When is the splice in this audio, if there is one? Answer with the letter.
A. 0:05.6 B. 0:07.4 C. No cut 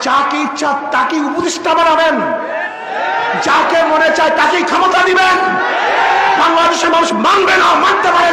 C